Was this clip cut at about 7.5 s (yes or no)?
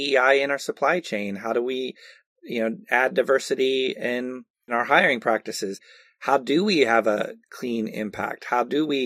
yes